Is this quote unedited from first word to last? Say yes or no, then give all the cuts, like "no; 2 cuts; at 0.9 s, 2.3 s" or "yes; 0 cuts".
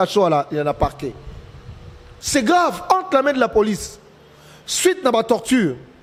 yes; 0 cuts